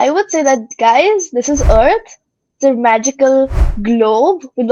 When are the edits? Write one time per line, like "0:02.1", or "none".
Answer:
none